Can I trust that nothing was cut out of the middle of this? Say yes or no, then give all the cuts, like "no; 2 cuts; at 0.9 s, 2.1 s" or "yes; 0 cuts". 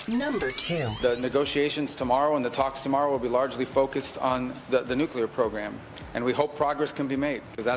no; 1 cut; at 0.9 s